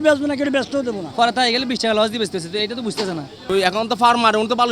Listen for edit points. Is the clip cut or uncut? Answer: cut